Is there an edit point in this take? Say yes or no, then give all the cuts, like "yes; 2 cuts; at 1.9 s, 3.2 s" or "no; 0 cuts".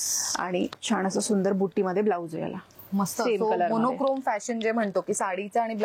no; 0 cuts